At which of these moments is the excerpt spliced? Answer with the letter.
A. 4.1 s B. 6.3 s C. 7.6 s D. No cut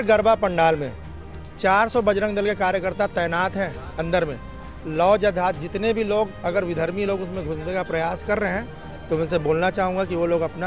D